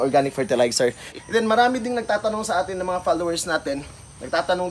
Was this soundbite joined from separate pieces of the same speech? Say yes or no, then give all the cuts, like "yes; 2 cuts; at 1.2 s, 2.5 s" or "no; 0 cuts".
yes; 1 cut; at 1.1 s